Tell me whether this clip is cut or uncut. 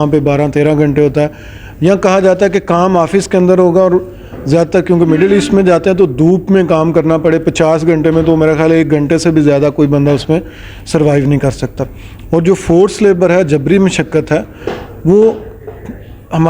uncut